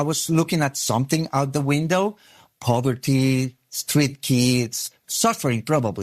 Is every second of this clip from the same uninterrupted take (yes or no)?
no